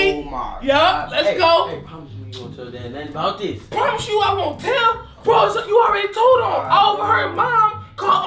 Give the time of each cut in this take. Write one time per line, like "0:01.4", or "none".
none

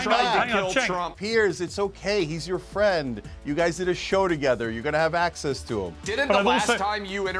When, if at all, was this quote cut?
0:01.1
0:06.1

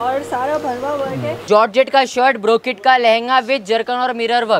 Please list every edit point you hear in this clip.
0:01.3

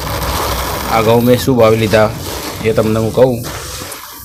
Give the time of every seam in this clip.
none

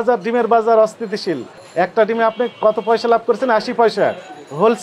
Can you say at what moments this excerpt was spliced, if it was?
0:01.1

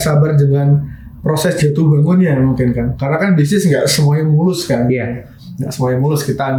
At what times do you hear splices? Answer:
none

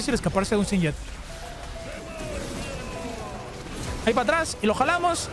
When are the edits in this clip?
none

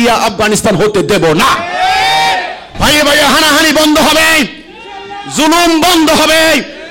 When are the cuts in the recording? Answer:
0:02.6

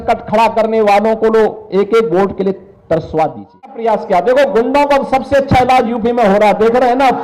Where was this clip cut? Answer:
0:03.8

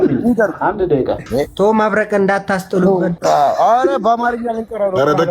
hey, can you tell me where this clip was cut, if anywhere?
0:01.2
0:03.2

